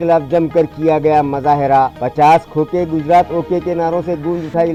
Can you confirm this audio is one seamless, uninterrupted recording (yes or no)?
yes